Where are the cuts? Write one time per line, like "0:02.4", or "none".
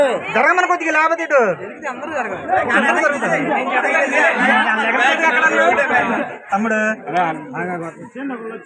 none